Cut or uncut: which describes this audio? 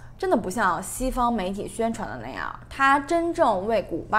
uncut